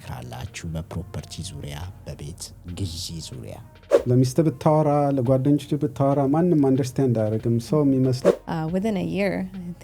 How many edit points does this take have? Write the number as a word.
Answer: two